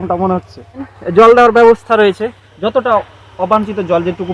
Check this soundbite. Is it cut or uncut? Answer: cut